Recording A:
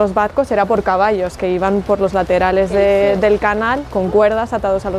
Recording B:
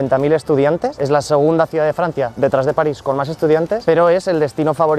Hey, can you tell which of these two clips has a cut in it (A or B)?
B